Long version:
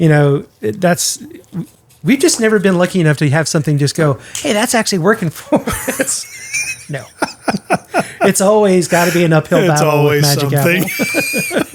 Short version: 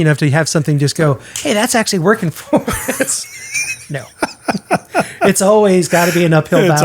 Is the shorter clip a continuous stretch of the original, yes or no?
yes